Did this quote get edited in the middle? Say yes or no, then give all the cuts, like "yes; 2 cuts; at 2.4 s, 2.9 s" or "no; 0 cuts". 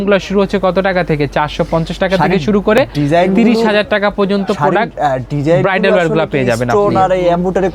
no; 0 cuts